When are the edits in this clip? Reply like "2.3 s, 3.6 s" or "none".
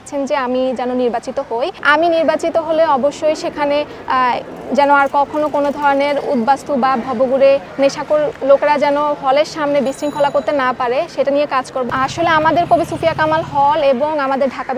1.8 s, 11.8 s